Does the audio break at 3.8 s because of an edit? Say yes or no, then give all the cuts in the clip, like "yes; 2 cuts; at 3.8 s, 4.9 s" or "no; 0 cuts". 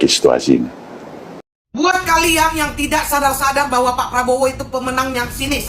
no; 1 cut; at 1.7 s